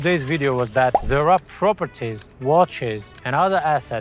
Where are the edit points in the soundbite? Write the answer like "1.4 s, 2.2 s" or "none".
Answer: none